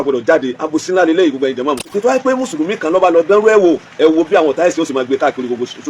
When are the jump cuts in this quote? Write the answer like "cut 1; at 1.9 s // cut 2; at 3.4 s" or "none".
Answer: cut 1; at 1.9 s